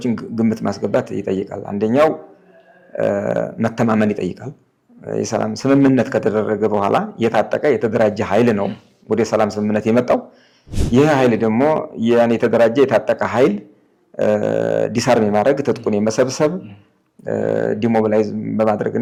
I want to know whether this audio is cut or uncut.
uncut